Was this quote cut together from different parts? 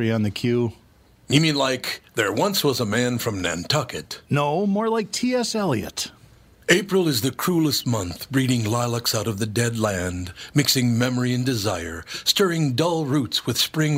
no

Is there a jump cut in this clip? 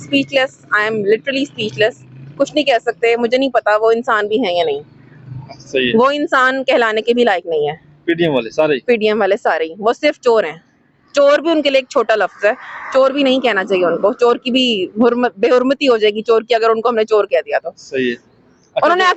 no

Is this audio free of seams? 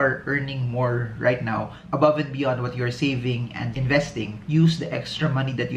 yes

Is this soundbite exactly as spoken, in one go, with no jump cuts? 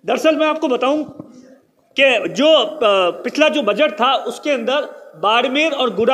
yes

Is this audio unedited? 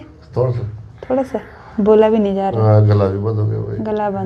yes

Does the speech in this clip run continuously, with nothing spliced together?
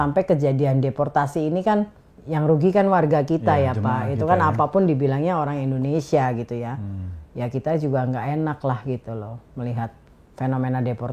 yes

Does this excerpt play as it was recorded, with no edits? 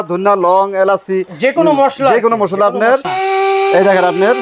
no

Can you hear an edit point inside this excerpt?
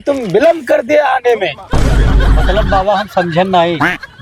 no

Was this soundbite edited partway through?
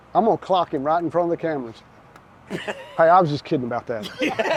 no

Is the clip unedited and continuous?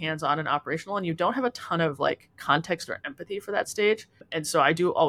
yes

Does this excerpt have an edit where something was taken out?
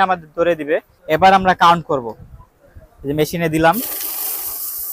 yes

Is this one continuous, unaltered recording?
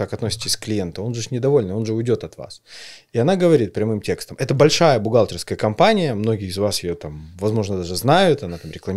yes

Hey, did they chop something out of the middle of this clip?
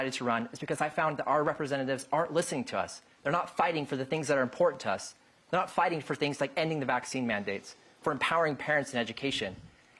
no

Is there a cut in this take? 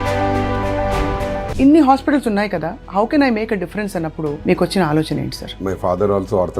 yes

